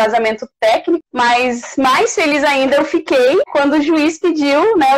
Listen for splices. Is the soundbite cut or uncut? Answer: cut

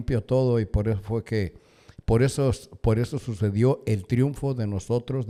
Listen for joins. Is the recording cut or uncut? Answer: uncut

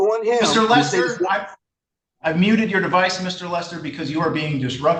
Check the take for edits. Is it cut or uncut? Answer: uncut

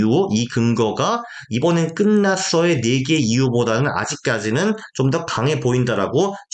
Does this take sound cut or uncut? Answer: uncut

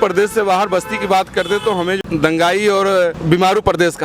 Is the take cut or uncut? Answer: cut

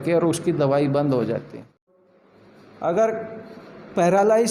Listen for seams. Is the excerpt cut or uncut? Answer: cut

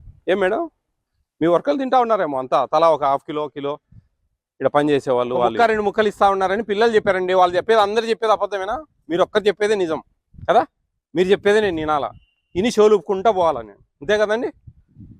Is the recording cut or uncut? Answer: cut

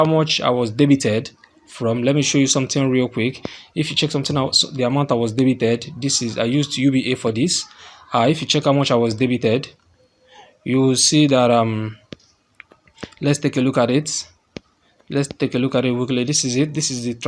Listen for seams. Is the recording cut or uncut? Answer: uncut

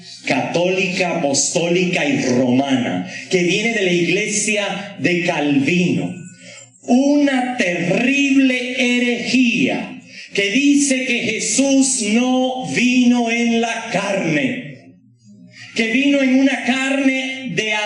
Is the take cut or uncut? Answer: uncut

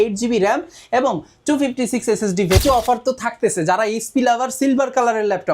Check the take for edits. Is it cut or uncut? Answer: cut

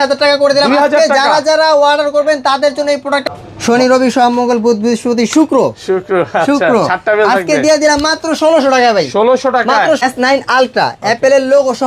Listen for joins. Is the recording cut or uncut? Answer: cut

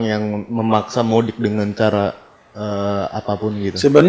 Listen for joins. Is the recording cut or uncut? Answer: uncut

